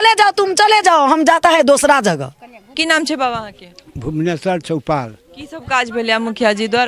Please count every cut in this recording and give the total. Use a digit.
1